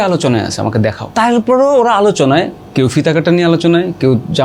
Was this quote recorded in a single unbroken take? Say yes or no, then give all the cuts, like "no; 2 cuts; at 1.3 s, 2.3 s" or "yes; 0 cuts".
no; 1 cut; at 1.0 s